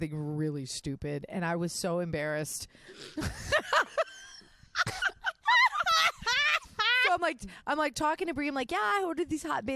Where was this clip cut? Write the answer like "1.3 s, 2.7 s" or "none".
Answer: none